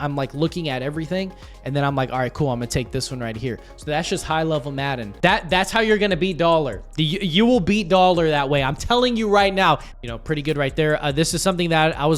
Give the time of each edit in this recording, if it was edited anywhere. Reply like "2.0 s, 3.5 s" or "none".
5.1 s, 9.9 s